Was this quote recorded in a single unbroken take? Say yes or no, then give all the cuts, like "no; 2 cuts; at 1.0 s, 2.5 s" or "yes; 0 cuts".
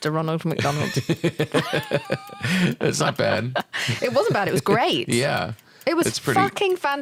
yes; 0 cuts